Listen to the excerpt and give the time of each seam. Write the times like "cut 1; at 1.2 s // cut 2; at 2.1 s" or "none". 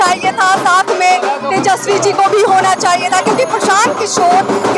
none